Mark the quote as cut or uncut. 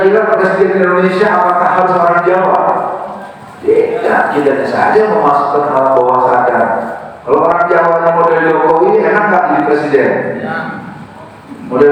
uncut